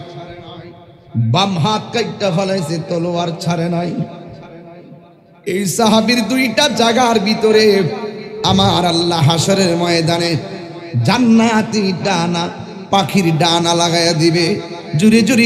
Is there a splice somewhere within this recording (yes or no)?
no